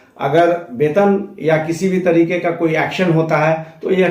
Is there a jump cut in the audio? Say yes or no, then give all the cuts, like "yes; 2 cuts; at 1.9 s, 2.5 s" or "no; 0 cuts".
no; 0 cuts